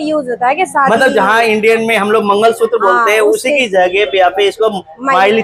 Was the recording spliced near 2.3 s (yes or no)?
no